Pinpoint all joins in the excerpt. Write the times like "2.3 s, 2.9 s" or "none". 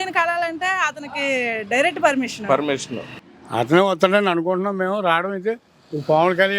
3.1 s